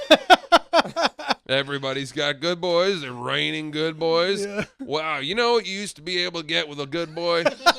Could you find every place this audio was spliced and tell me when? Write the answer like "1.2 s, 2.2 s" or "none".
1.4 s